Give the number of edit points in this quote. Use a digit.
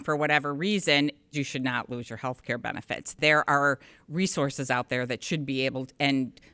2